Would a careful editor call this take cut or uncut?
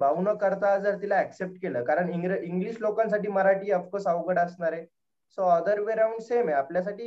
uncut